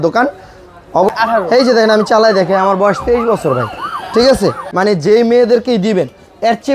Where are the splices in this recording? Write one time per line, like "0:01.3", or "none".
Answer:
0:01.1
0:04.6